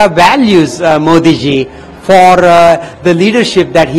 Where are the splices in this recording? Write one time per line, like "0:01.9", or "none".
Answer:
none